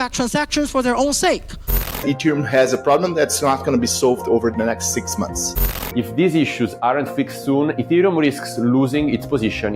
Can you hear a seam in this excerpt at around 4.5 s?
no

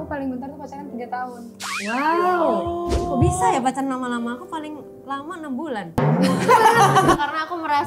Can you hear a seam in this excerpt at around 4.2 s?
no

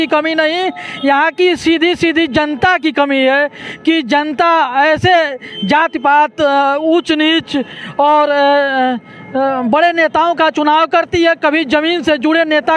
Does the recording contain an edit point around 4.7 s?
no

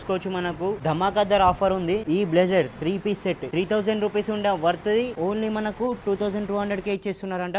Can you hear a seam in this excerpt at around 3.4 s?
yes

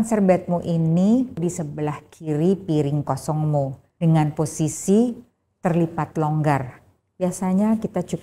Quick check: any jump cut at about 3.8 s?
yes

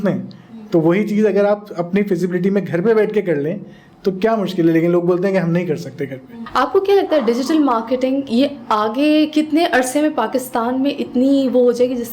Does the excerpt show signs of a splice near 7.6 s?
no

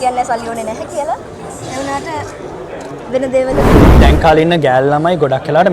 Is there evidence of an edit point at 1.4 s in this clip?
no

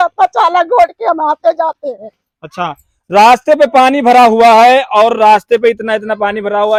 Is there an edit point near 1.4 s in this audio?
no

